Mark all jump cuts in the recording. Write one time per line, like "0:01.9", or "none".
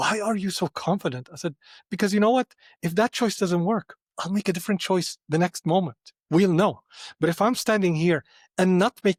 none